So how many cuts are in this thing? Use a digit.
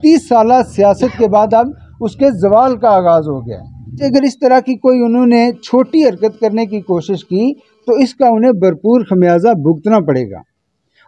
1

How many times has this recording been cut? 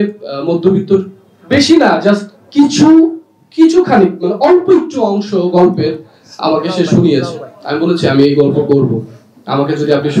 0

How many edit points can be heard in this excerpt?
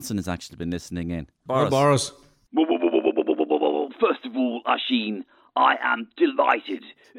2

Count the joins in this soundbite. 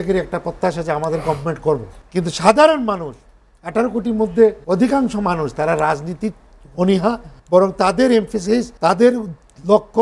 4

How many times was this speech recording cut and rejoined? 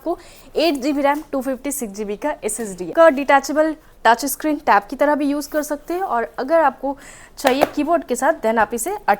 1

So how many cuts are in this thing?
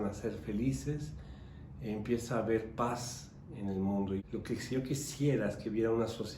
1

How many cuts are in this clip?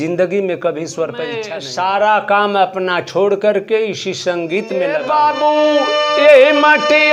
2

